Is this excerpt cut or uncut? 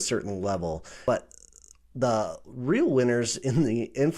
cut